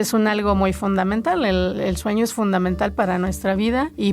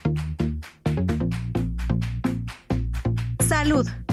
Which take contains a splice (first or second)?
first